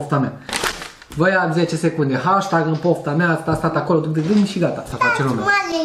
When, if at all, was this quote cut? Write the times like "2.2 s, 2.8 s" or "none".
4.9 s